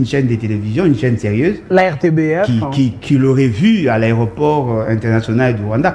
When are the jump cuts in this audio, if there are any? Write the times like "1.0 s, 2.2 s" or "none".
none